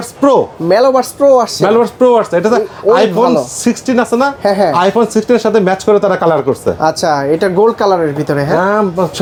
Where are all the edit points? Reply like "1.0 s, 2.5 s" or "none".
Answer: none